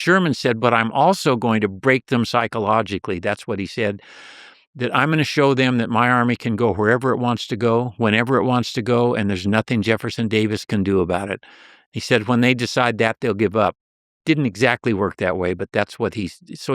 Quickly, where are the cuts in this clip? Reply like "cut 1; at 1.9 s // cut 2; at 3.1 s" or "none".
none